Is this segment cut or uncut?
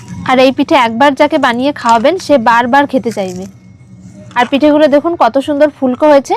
cut